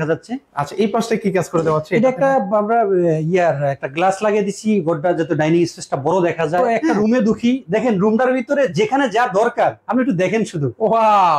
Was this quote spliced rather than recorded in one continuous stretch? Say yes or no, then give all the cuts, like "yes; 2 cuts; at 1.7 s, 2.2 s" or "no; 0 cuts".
yes; 1 cut; at 6.9 s